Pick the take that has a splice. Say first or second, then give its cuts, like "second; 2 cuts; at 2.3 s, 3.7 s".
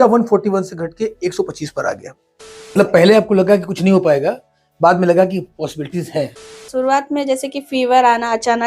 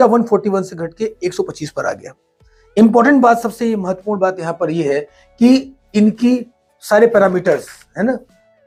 first; 2 cuts; at 2.8 s, 6.6 s